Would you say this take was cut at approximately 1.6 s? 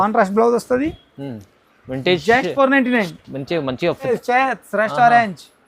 no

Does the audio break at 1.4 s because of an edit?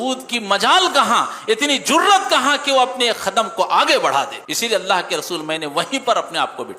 no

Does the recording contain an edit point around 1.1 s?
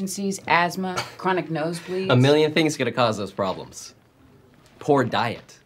yes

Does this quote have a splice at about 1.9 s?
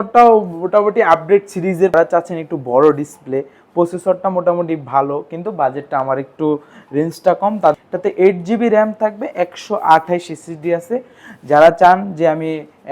yes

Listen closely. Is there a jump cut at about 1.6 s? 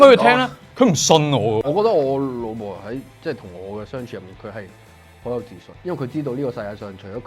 yes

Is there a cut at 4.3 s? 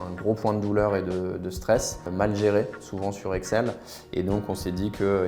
no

